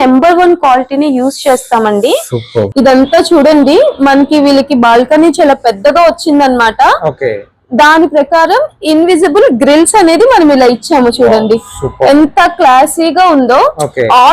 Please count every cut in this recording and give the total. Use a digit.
1